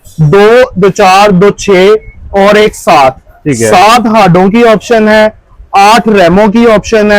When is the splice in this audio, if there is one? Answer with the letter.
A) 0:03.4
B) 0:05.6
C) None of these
C